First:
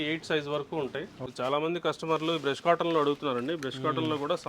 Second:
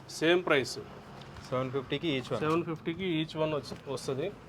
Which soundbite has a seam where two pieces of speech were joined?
first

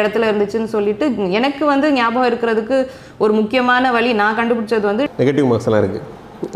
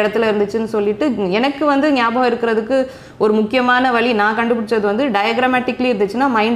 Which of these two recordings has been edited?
first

